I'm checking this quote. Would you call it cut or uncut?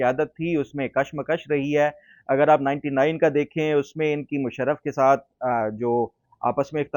uncut